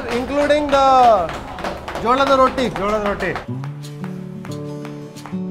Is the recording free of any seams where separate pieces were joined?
no; 1 cut; at 3.4 s

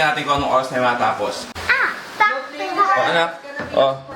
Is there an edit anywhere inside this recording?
yes; 1 cut; at 1.5 s

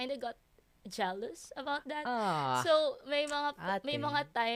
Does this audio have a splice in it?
no; 0 cuts

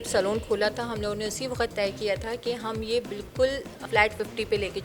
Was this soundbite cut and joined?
yes; 1 cut; at 3.7 s

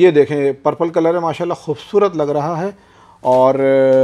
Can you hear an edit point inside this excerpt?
no; 0 cuts

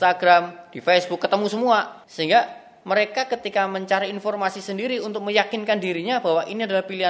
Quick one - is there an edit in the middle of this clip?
yes; 1 cut; at 2.0 s

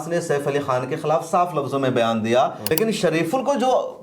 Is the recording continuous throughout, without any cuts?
no; 1 cut; at 2.6 s

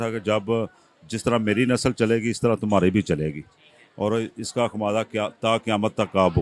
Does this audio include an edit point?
no; 0 cuts

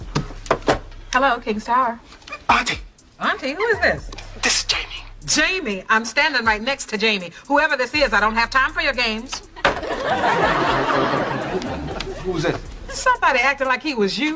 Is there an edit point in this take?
no; 0 cuts

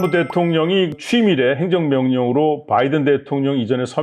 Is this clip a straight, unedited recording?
no; 1 cut; at 0.9 s

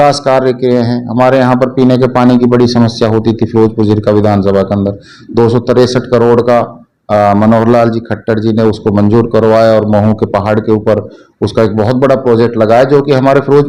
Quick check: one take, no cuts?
yes; 0 cuts

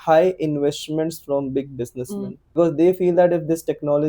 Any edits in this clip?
yes; 1 cut; at 2.6 s

